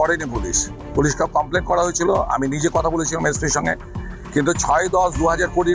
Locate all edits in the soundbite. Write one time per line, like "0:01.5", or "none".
none